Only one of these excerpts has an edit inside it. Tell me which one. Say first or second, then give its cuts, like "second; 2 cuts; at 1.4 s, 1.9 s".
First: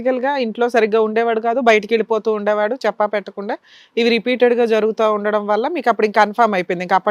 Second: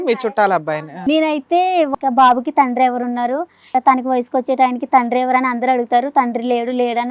second; 3 cuts; at 0.9 s, 1.9 s, 3.6 s